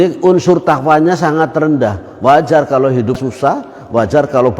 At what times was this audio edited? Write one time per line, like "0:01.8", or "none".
0:03.2